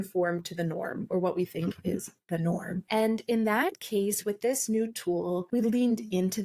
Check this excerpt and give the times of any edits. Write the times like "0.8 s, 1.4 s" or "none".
2.8 s, 5.5 s